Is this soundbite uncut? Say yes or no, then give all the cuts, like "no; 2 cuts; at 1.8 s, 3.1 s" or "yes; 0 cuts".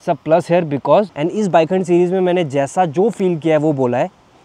no; 1 cut; at 1.2 s